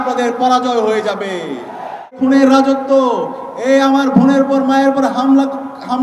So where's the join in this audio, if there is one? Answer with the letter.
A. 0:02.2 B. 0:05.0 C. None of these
A